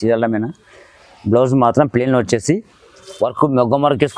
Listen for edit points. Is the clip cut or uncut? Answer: uncut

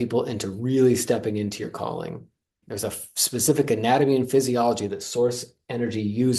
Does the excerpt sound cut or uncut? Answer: cut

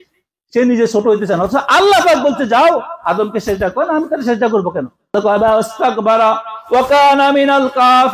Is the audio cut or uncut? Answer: cut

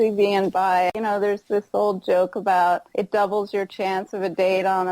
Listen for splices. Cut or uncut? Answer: cut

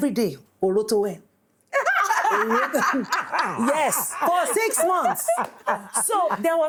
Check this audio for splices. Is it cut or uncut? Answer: uncut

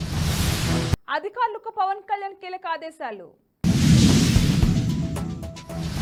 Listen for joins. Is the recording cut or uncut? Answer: uncut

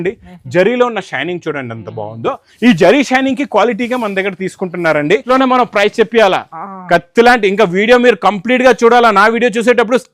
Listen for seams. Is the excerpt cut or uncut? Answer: cut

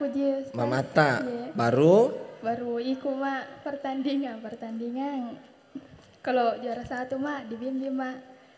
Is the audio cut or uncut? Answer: uncut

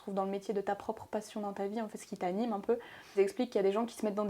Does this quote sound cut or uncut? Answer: cut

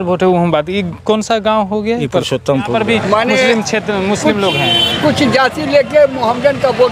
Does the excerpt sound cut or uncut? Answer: cut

